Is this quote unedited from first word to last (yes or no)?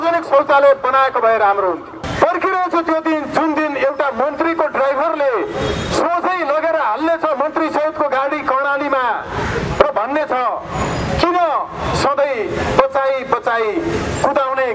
no